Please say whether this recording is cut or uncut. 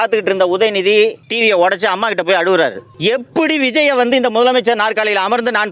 cut